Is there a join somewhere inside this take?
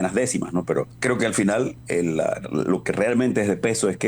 yes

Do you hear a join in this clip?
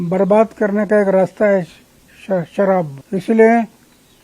yes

